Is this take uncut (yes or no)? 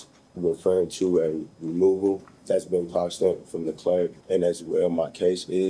no